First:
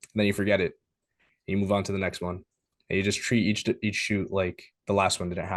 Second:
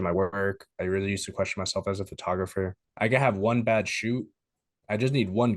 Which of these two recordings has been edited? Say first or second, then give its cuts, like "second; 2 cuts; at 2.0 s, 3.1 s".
second; 1 cut; at 2.8 s